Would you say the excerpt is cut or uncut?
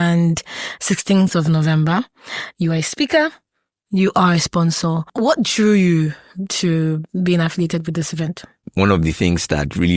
cut